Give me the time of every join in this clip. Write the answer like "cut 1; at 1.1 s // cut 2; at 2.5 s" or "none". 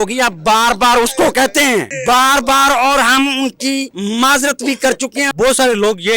cut 1; at 1.9 s // cut 2; at 3.9 s // cut 3; at 5.3 s